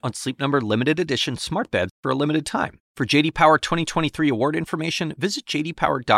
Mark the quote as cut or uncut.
uncut